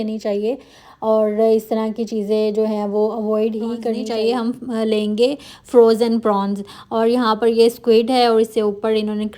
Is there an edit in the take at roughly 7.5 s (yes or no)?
no